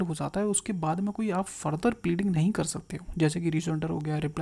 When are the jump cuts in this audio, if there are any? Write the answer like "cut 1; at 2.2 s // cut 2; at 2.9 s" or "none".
none